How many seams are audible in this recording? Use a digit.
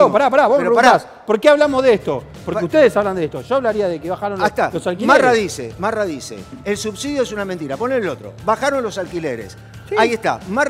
0